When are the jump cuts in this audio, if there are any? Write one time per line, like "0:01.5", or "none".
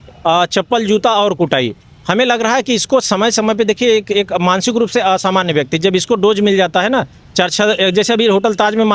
none